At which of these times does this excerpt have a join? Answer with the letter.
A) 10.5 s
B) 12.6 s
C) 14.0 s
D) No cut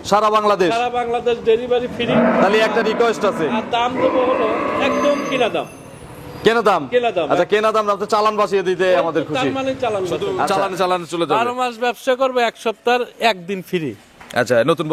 A